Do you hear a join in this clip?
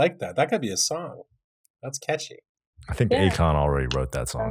no; 0 cuts

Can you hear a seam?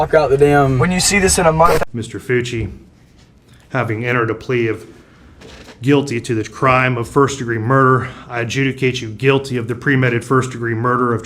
yes; 1 cut; at 1.9 s

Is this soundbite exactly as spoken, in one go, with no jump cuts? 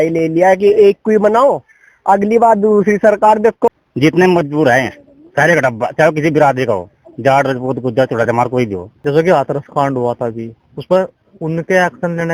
no; 2 cuts; at 3.7 s, 8.9 s

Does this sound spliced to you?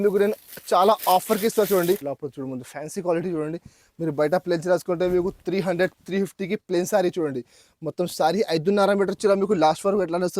yes; 1 cut; at 2.1 s

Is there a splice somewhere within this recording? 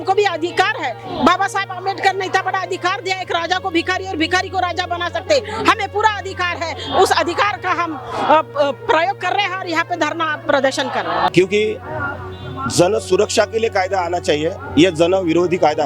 yes; 1 cut; at 11.3 s

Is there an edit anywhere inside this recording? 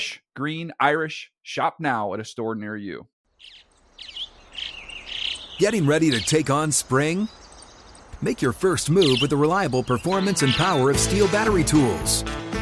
yes; 1 cut; at 3.1 s

